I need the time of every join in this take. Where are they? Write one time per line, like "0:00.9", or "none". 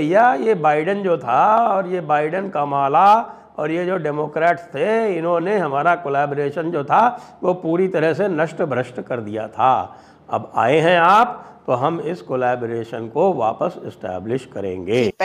none